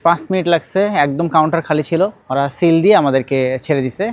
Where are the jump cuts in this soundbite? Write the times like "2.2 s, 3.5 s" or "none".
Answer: 2.2 s